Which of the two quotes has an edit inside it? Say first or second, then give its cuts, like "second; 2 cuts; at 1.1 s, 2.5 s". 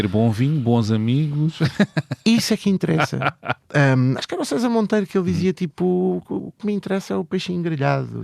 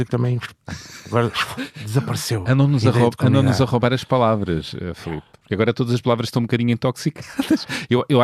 first; 1 cut; at 3.5 s